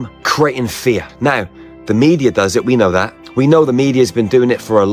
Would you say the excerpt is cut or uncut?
uncut